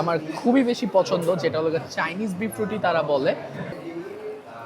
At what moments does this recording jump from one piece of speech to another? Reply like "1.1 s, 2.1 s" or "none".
3.7 s